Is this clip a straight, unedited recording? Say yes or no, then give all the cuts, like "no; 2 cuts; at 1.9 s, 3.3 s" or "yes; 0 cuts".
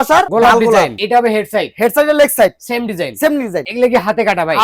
no; 2 cuts; at 0.9 s, 3.6 s